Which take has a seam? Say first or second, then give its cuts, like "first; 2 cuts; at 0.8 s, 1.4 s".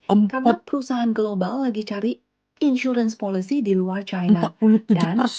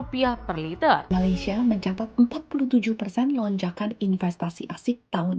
second; 1 cut; at 1.0 s